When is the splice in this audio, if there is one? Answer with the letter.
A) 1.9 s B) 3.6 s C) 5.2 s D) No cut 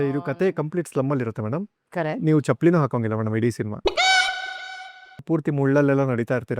C